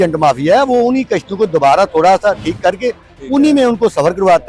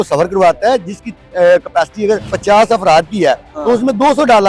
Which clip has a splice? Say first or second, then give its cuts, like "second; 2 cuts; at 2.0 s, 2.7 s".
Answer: second; 1 cut; at 2.3 s